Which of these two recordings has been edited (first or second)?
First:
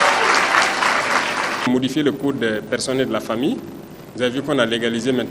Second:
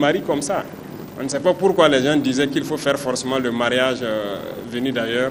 first